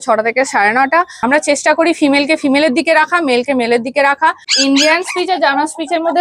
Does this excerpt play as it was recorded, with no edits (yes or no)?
no